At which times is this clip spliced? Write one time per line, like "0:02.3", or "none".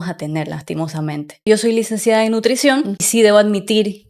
0:01.5
0:03.0